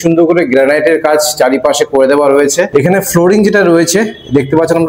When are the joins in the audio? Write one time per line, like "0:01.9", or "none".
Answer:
0:02.7